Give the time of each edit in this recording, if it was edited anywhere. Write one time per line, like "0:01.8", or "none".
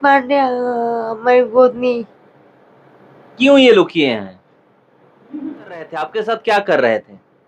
0:06.0